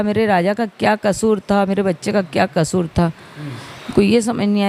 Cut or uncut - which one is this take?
uncut